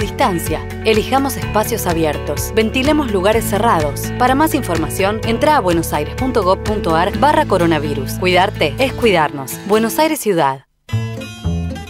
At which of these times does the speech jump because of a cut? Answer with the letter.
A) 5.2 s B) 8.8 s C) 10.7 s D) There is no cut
C